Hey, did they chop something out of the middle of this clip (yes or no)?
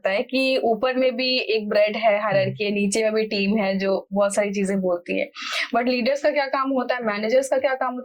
no